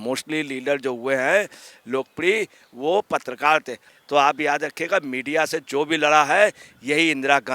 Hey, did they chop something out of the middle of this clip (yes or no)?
yes